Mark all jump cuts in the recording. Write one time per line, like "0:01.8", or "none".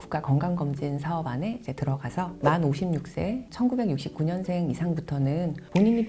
0:03.5